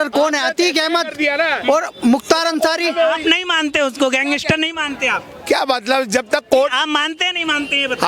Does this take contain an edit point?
no; 0 cuts

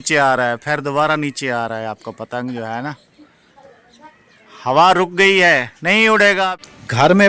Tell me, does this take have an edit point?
no; 0 cuts

